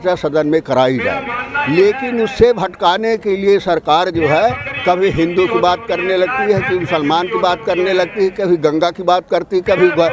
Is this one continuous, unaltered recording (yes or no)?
yes